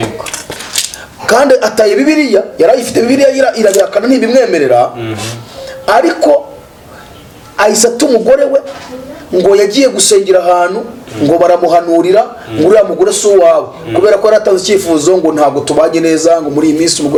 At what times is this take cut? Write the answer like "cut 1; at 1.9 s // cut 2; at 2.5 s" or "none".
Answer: none